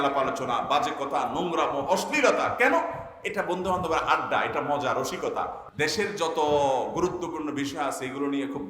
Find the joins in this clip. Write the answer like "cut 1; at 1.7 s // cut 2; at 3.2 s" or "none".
cut 1; at 5.6 s